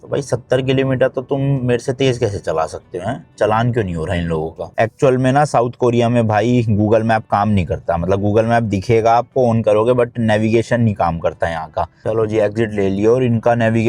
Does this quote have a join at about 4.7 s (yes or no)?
yes